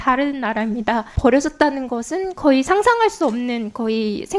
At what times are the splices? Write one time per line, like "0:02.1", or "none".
0:01.1